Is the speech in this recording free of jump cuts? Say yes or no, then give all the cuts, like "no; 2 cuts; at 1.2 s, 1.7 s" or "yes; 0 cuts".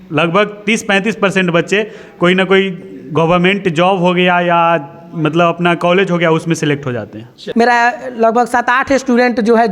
no; 1 cut; at 7.4 s